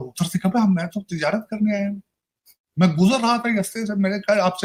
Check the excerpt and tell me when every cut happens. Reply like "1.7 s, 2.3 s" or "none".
none